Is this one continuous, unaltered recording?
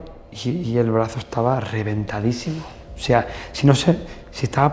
yes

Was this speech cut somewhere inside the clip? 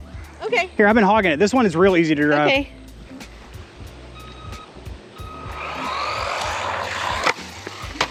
no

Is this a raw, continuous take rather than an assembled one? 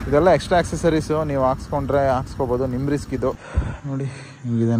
no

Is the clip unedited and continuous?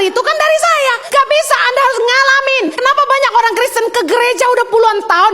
no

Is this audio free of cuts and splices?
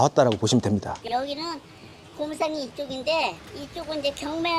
no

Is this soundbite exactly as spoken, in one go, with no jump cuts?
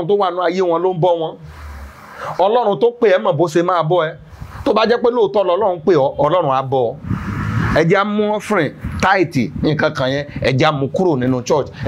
yes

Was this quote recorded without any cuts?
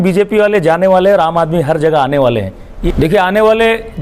no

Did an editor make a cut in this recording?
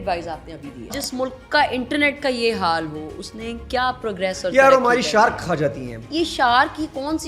yes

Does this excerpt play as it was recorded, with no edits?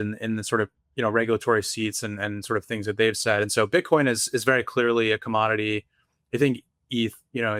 yes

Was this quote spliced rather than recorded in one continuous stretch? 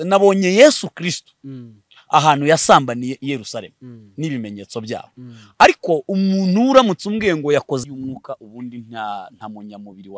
yes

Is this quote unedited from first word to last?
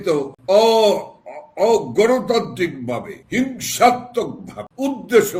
yes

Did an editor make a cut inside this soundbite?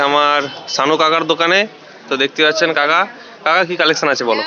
no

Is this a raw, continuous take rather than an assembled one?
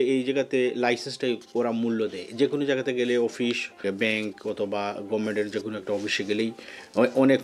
no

